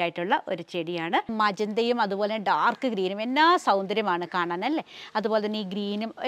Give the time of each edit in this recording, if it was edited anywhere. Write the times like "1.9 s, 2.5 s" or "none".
1.3 s